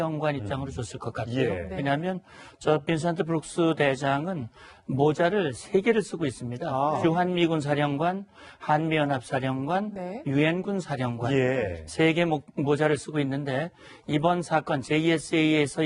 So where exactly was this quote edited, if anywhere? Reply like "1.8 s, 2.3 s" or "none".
14.2 s

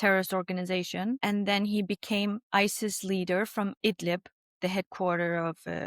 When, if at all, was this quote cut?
1.2 s

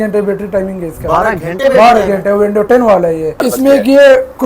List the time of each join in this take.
3.4 s

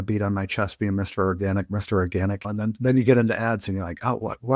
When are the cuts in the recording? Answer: 2.4 s

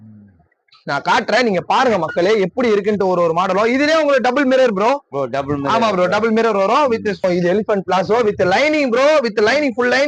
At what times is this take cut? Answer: 7.2 s

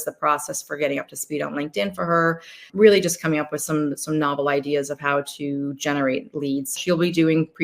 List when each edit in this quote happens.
2.7 s, 6.7 s

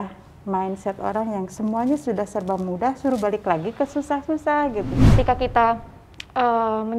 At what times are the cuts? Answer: 5.0 s

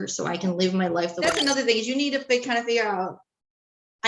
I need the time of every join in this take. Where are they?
1.2 s

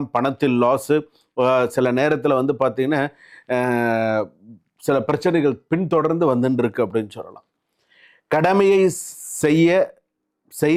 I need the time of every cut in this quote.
none

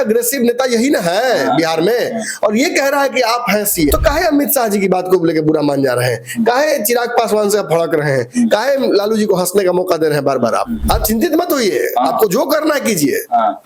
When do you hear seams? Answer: 3.9 s, 10.8 s

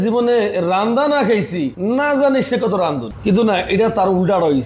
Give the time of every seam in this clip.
1.7 s, 3.1 s

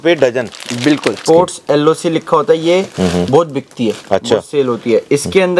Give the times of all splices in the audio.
1.2 s

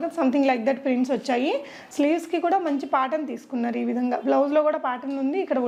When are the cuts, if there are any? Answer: none

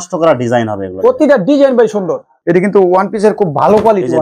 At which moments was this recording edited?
2.3 s

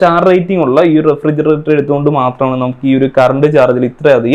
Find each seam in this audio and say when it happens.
none

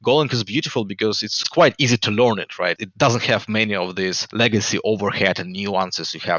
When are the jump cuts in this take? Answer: 1.3 s, 2.8 s, 4.2 s

